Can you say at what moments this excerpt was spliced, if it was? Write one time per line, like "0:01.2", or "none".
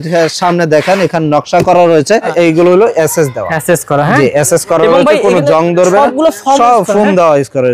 0:02.3